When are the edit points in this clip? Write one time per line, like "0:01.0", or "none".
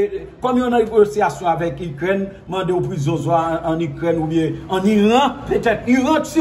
none